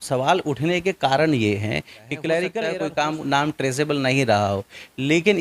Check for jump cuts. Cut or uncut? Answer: cut